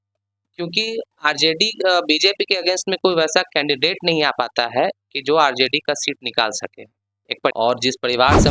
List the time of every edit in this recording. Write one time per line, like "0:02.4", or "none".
0:07.5